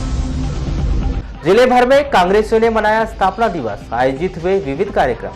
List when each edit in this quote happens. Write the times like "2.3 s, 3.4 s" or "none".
1.1 s